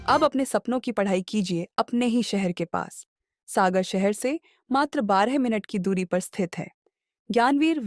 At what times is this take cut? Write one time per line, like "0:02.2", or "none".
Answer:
none

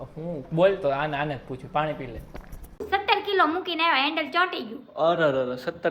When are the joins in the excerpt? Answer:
0:02.8

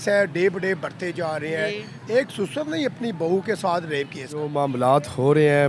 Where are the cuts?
0:04.5

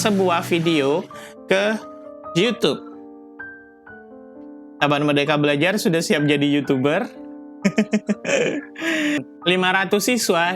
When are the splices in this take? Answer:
0:09.2

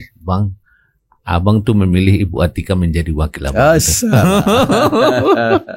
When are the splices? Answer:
none

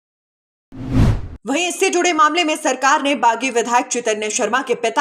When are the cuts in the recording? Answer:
none

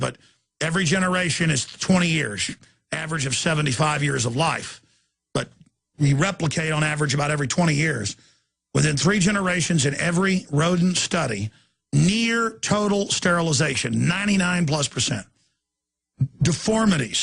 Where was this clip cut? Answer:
0:01.7

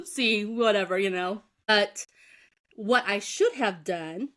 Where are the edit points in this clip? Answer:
0:01.7

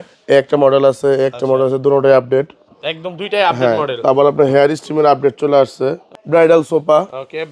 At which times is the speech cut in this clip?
0:06.1

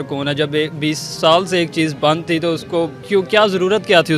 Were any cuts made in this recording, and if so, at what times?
0:03.0

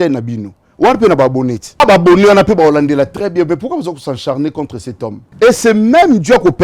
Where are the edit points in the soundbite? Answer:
0:01.8
0:05.2

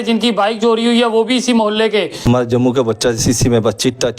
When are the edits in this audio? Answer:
0:02.2

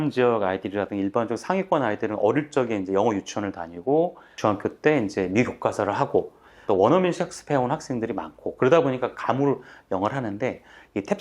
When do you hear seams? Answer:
0:04.2
0:06.6

